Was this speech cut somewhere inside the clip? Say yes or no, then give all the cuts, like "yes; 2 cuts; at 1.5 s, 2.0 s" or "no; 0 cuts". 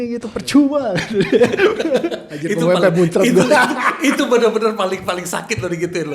no; 0 cuts